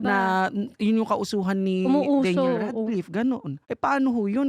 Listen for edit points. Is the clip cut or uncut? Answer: uncut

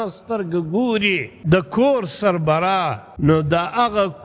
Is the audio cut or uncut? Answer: cut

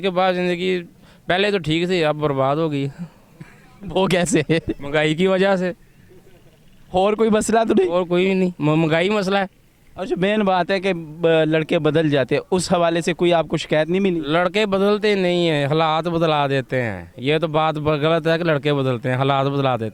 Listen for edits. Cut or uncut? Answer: uncut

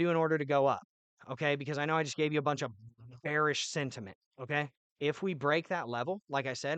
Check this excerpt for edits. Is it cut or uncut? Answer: cut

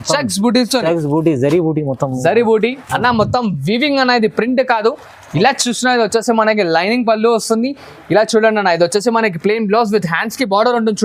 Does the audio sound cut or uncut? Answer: uncut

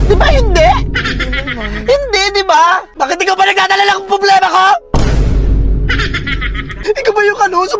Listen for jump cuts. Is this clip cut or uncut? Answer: cut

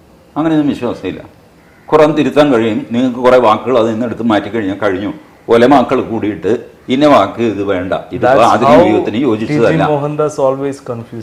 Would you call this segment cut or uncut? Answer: uncut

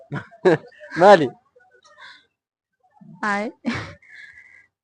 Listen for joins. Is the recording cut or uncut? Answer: uncut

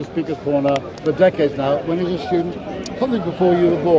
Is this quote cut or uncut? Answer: cut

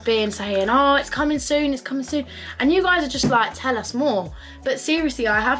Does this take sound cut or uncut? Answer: uncut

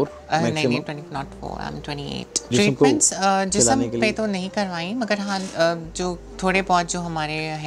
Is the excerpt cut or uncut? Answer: cut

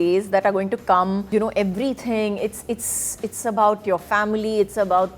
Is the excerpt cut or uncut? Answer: cut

